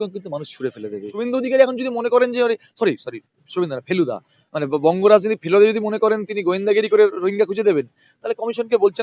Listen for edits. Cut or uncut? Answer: cut